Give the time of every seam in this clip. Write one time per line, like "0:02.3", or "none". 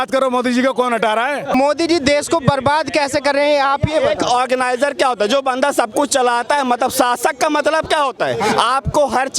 0:01.5